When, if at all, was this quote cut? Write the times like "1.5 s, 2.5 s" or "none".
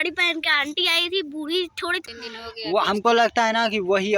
2.0 s